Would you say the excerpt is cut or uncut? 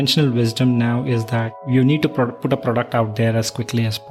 cut